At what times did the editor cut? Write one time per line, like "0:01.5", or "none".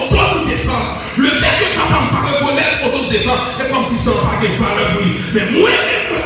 none